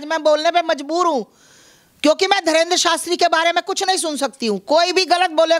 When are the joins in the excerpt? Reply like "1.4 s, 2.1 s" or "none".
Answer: none